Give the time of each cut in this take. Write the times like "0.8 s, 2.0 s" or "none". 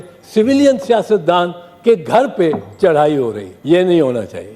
3.5 s